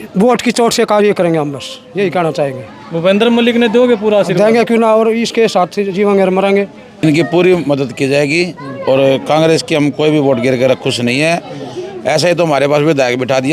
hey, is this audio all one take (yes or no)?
no